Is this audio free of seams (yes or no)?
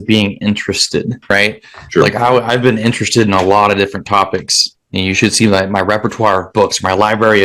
no